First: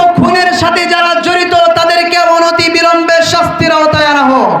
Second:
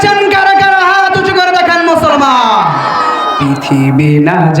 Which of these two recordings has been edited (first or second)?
second